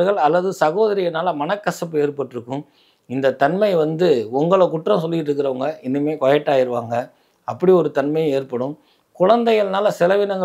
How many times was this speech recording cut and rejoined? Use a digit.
0